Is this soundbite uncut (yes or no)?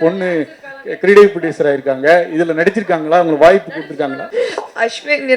no